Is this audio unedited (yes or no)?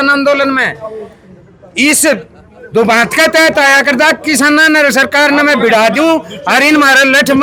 yes